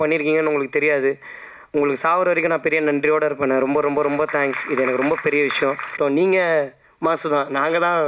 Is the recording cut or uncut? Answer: cut